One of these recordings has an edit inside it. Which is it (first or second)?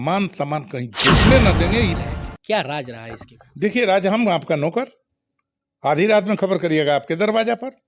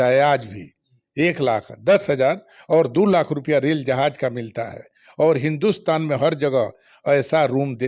first